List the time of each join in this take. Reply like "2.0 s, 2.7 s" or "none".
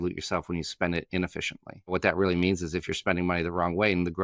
1.9 s